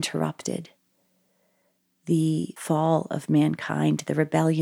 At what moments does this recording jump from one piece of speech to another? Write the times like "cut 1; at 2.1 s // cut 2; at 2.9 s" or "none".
cut 1; at 2.6 s